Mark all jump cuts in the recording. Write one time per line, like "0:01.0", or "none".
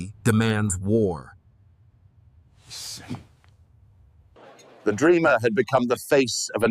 0:04.4